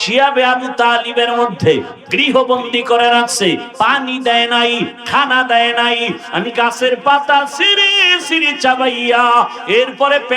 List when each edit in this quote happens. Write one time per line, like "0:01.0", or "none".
none